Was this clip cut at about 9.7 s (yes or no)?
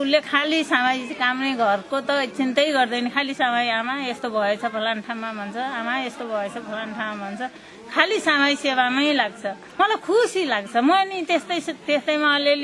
yes